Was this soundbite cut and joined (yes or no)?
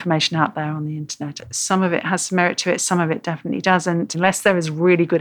yes